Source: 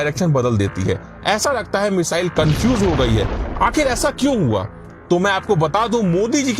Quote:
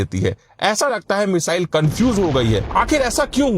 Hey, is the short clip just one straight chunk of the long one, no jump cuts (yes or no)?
no